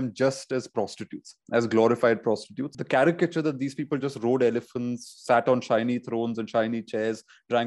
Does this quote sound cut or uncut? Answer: cut